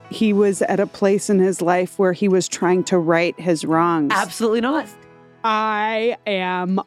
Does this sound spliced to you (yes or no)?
yes